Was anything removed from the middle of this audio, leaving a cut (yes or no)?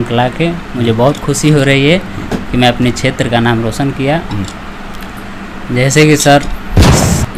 no